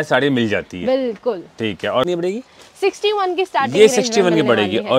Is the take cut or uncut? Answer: cut